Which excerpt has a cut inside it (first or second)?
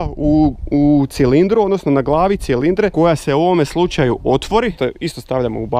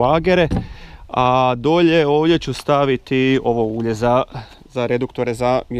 first